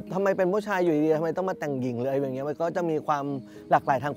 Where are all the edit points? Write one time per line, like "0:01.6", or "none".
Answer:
none